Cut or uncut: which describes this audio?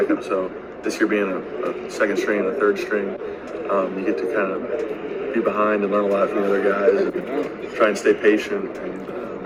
uncut